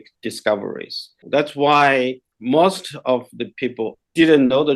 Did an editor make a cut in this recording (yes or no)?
yes